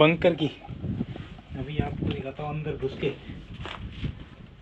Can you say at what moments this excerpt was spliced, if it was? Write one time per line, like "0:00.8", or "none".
none